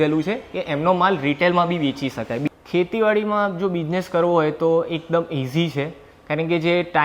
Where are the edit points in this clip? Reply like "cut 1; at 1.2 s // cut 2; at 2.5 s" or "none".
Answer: cut 1; at 2.4 s